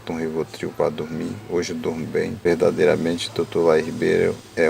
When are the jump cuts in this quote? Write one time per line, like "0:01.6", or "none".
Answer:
0:02.4